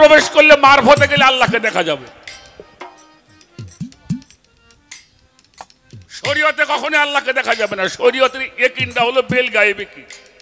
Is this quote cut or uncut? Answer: uncut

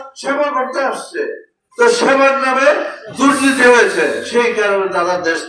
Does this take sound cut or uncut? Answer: cut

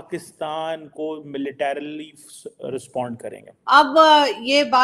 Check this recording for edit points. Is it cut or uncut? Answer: cut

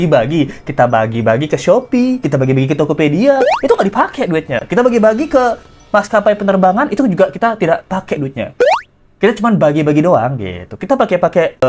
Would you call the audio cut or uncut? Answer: uncut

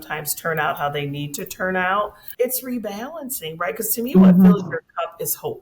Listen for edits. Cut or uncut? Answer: cut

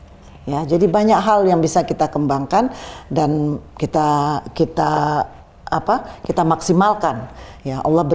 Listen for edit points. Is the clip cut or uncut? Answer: uncut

